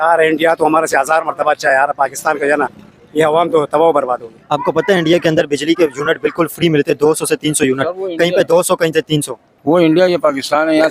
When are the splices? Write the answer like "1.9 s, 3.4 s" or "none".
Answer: 4.3 s